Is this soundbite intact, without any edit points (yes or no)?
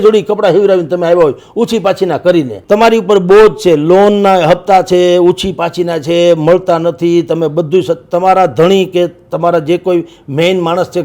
no